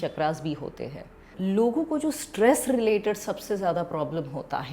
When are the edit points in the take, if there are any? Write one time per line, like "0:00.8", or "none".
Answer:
0:01.3

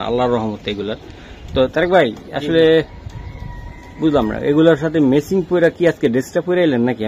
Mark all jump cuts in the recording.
none

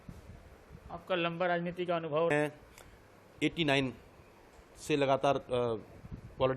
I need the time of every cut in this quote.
0:02.3

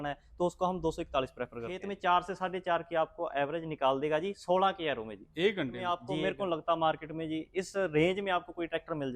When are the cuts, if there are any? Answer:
0:01.9
0:06.0

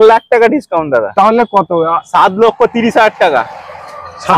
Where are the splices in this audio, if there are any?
none

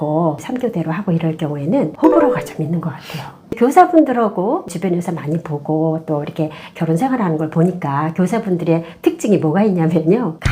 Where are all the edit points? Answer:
0:03.5

